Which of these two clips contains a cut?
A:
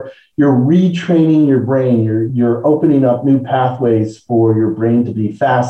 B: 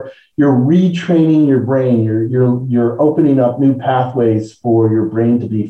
A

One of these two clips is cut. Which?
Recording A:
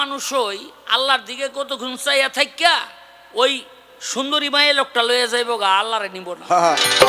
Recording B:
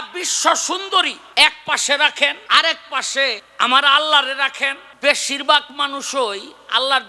B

